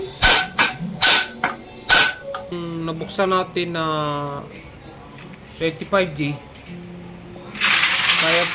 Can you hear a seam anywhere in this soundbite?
yes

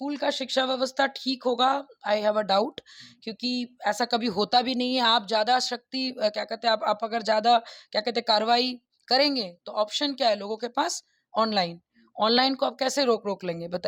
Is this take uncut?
yes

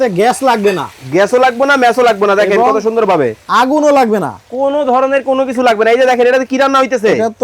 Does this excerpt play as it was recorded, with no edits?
yes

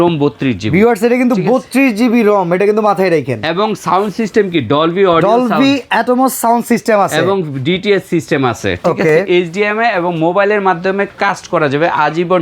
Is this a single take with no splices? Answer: yes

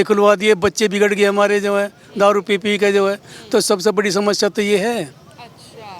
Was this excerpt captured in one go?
yes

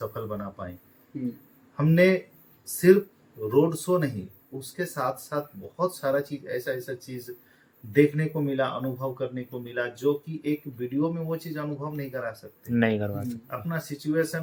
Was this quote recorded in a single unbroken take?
yes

